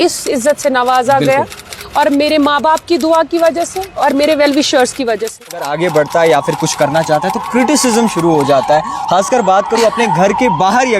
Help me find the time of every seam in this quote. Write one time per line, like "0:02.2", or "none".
0:05.7